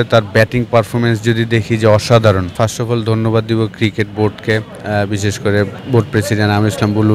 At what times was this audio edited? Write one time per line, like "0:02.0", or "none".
0:02.5
0:05.8